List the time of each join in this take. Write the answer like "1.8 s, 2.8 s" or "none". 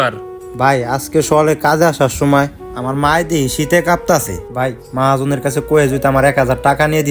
none

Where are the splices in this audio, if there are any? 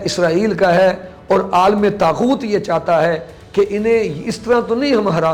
none

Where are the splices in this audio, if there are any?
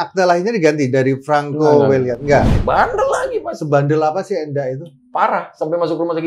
2.5 s

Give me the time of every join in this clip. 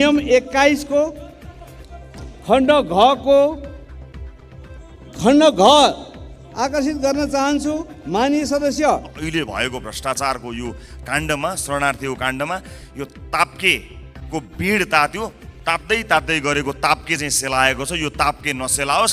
3.8 s, 5.1 s, 9.2 s

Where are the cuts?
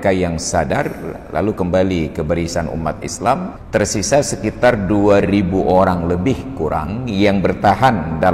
3.6 s

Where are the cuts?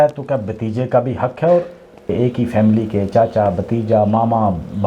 2.1 s

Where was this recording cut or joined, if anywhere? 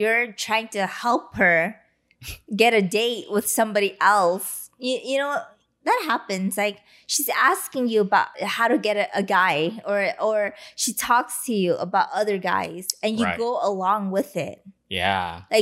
8.4 s

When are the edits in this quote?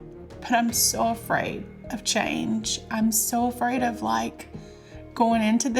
none

